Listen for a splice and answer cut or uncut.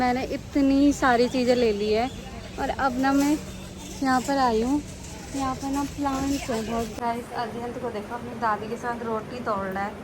cut